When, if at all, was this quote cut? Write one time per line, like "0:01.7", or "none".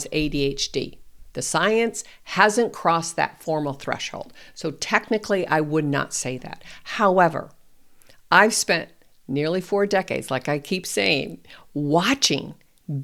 none

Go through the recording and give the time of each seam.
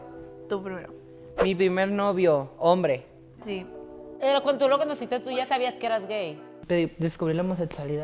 0:04.0
0:06.5

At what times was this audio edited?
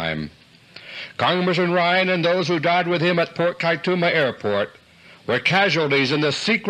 0:02.2

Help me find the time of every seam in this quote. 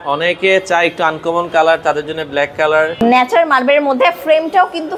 0:03.0

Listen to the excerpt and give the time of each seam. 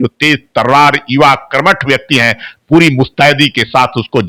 none

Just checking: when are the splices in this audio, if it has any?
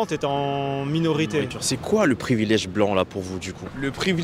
0:01.6

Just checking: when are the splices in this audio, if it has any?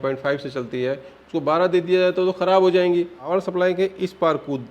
0:03.2

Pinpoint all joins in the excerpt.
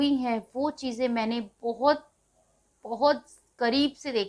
none

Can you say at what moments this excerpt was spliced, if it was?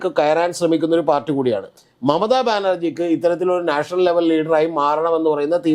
0:01.7

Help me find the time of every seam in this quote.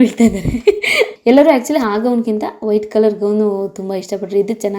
0:01.1

